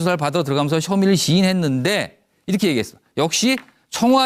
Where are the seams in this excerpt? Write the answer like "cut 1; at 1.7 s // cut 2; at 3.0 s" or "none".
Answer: none